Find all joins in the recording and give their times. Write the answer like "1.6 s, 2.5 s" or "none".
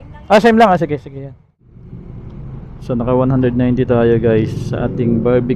1.9 s